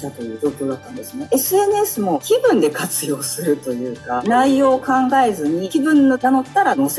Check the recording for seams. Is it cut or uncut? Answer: uncut